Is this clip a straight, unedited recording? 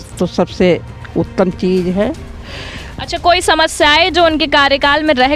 yes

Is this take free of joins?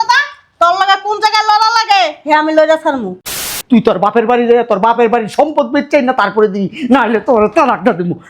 no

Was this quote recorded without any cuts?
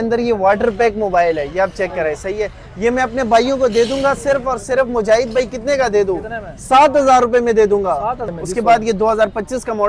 no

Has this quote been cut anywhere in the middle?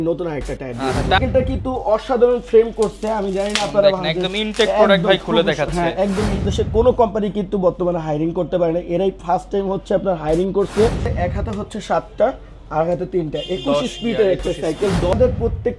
yes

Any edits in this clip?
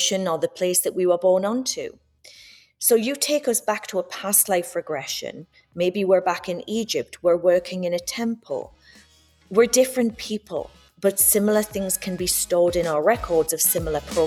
no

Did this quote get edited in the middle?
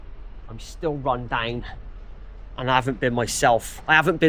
no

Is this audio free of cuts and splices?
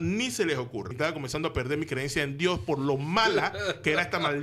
no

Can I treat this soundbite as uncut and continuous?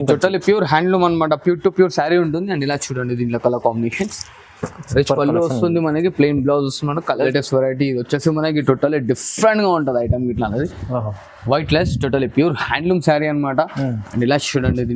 no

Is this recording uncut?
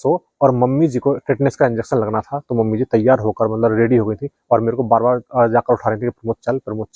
yes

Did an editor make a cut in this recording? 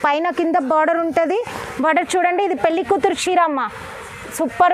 no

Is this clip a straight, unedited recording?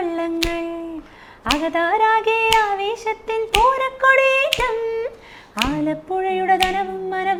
yes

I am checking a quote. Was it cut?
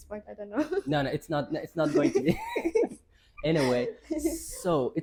no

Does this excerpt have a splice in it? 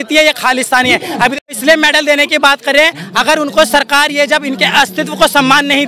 yes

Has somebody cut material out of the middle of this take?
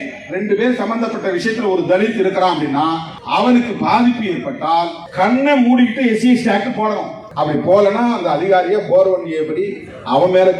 yes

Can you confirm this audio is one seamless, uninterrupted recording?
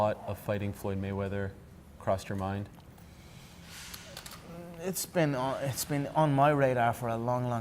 no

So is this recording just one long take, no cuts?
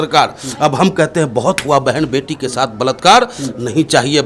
yes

